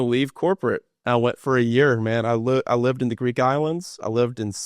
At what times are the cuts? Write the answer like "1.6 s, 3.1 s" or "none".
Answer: 0.9 s

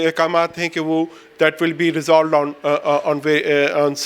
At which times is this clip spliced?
none

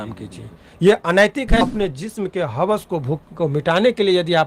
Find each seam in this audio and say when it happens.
1.6 s

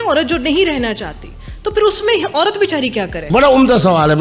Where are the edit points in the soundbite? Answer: 3.3 s

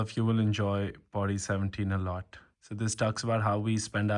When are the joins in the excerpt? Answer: none

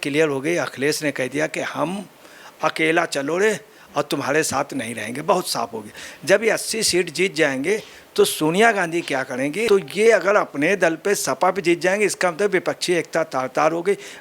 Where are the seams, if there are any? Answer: 9.7 s

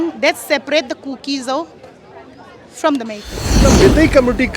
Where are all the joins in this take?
3.7 s

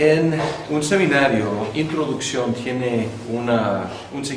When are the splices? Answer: 3.4 s

